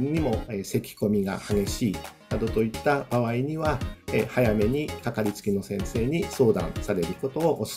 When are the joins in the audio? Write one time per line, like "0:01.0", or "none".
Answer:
none